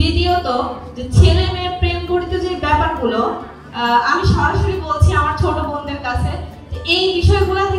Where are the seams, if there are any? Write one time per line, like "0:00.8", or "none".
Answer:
none